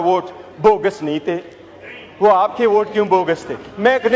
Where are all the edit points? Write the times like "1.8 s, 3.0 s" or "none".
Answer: none